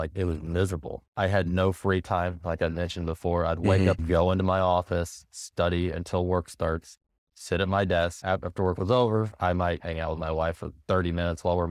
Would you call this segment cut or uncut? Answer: cut